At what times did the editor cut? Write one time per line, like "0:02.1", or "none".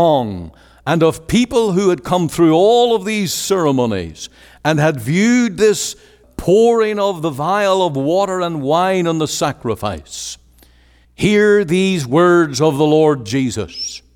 0:06.1